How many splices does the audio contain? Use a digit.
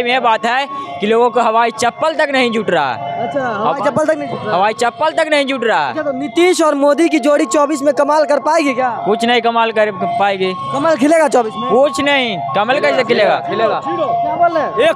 0